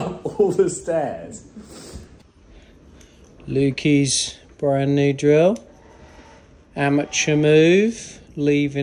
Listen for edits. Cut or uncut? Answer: cut